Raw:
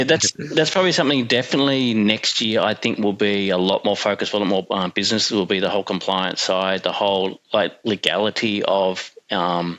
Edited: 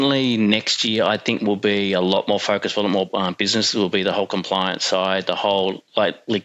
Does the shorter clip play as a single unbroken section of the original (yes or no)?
yes